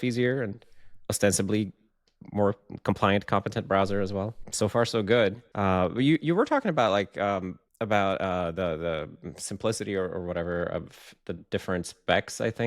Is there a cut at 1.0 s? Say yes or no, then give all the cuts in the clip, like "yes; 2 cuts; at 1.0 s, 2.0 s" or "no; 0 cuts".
no; 3 cuts; at 4.4 s, 5.5 s, 7.6 s